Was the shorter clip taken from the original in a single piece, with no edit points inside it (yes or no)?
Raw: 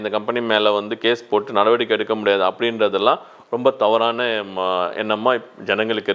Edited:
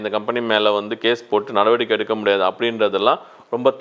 yes